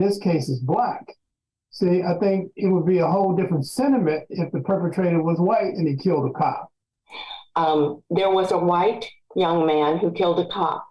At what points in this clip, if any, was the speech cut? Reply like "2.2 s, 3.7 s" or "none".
6.9 s